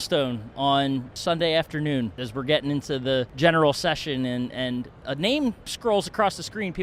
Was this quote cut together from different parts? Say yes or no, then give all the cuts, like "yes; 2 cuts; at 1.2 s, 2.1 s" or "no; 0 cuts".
yes; 4 cuts; at 1.1 s, 2.2 s, 3.3 s, 5.7 s